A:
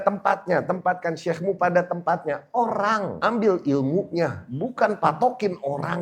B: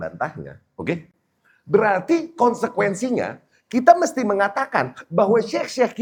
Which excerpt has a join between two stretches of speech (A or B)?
A